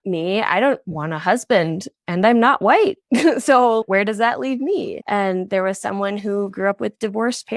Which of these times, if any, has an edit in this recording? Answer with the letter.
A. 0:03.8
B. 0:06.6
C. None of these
A